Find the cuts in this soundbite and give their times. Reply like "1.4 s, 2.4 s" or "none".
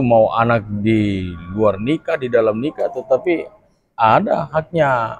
none